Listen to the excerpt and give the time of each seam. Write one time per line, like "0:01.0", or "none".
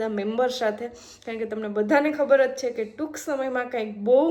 none